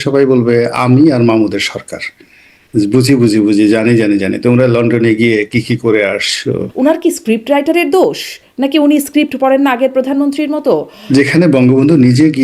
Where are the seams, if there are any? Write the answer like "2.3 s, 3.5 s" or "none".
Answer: 6.7 s, 10.9 s